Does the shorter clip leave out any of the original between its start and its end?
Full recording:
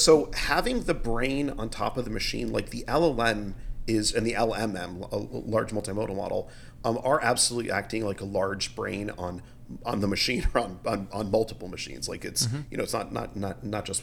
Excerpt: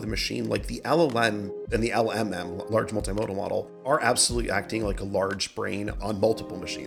yes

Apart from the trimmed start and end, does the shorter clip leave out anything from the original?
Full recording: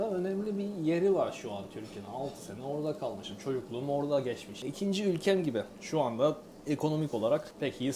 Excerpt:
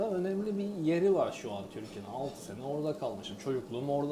no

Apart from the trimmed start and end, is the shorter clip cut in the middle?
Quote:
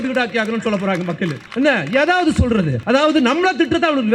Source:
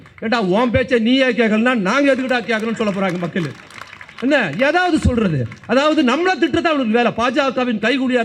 yes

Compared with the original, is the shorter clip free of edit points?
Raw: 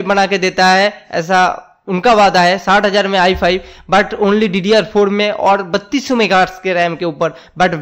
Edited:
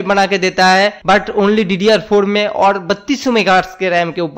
no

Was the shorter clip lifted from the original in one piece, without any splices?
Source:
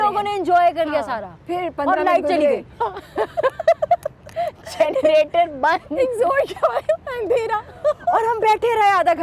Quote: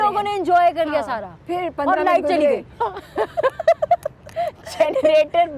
yes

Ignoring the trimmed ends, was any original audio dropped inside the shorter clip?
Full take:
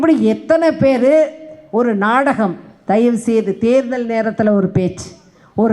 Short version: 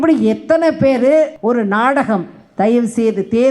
yes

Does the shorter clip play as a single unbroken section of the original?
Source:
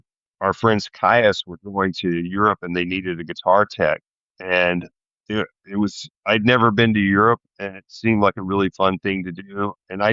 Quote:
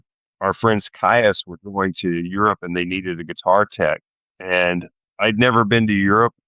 no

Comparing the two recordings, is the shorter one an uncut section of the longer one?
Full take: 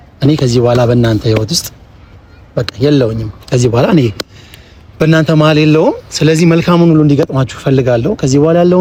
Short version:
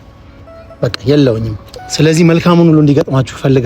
no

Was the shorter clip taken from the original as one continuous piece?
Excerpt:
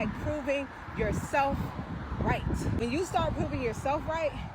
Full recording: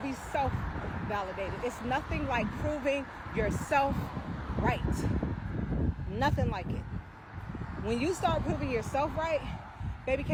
no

